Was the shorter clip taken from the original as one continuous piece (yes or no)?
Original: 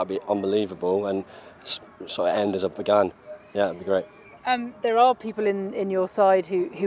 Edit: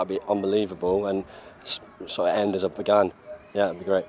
yes